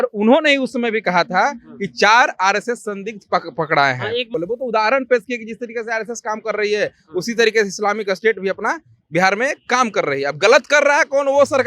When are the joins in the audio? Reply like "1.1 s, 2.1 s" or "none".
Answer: 4.3 s